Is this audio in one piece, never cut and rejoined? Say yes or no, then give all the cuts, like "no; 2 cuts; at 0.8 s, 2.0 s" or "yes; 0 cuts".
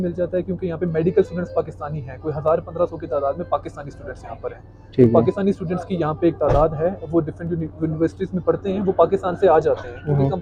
yes; 0 cuts